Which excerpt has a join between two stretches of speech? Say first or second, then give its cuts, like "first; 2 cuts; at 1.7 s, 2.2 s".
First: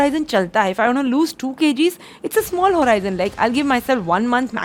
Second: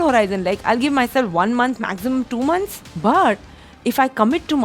second; 1 cut; at 2.8 s